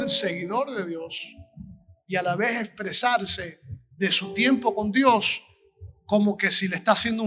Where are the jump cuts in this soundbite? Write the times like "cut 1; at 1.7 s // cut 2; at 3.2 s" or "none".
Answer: none